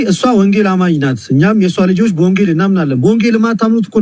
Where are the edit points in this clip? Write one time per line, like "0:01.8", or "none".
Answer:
none